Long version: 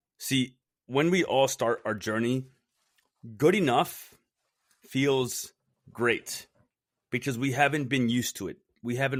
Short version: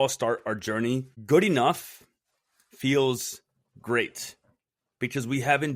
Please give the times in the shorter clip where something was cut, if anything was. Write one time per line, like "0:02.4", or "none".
0:01.1